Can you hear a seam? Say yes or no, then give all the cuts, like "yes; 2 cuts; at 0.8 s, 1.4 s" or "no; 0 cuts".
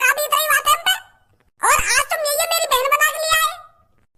no; 0 cuts